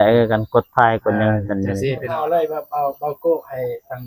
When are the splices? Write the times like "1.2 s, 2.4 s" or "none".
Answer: 2.2 s